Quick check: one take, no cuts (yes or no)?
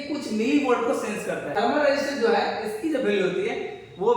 no